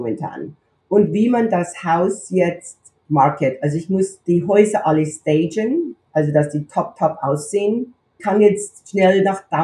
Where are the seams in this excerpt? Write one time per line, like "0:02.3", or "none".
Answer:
0:04.2
0:08.2